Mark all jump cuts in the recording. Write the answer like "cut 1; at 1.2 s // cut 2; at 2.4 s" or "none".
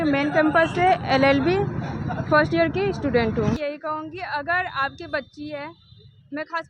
cut 1; at 3.6 s